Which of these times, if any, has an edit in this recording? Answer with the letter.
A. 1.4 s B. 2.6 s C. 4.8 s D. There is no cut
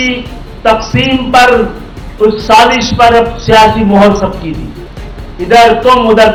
D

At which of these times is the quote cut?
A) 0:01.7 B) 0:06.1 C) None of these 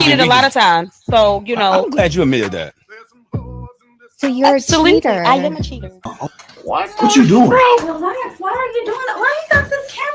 B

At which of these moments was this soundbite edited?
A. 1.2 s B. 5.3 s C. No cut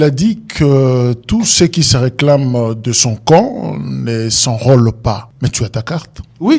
B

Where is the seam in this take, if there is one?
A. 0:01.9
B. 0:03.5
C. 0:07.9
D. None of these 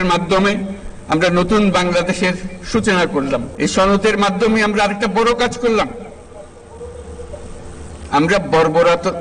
B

